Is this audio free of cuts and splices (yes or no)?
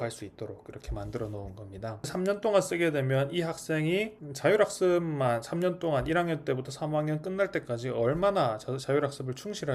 no